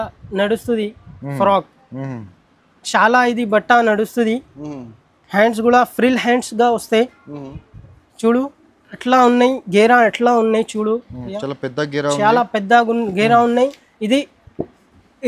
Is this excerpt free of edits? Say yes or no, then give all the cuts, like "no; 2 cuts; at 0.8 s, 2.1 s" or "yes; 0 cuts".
yes; 0 cuts